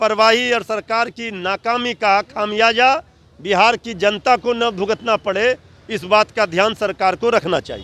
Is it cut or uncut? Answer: uncut